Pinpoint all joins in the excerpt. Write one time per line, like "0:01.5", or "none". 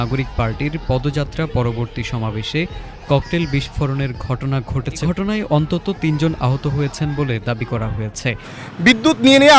0:05.0
0:08.5